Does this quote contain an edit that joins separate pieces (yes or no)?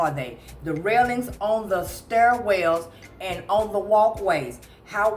no